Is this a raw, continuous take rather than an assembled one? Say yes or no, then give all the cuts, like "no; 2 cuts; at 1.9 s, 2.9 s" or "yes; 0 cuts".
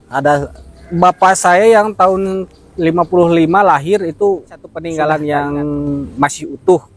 no; 1 cut; at 4.8 s